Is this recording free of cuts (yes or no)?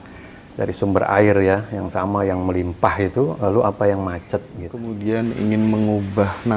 no